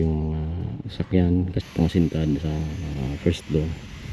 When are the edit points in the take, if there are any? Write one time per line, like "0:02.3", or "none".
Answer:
0:01.5